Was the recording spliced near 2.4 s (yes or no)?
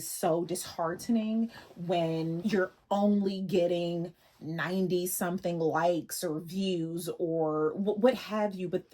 yes